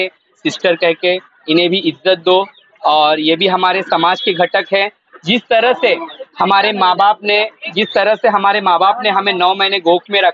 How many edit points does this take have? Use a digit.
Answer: 0